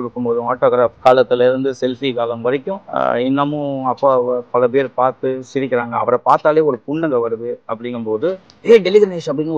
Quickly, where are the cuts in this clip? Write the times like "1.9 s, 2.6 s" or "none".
1.0 s, 2.8 s, 8.5 s